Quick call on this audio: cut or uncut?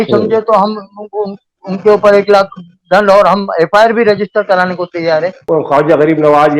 cut